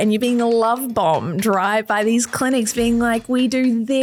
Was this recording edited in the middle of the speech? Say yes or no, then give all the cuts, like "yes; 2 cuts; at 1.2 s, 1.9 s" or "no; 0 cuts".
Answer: no; 0 cuts